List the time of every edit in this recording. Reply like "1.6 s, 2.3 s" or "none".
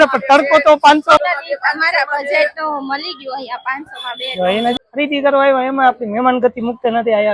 1.2 s, 4.7 s